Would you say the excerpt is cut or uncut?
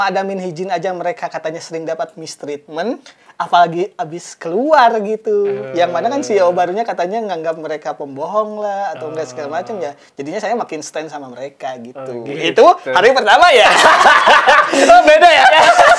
uncut